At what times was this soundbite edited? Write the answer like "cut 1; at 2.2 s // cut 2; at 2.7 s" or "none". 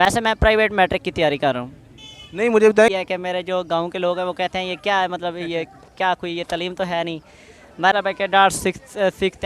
cut 1; at 2.9 s // cut 2; at 7.9 s